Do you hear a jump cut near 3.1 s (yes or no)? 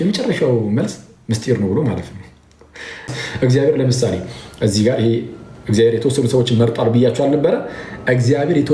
yes